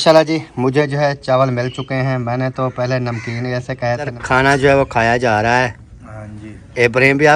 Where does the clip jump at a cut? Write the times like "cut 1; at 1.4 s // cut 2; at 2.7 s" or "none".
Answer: cut 1; at 4.2 s